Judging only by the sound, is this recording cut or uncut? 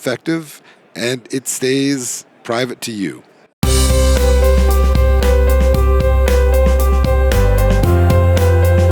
cut